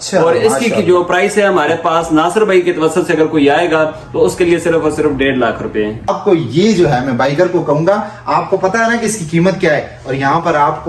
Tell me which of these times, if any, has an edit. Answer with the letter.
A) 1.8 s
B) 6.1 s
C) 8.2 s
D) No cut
B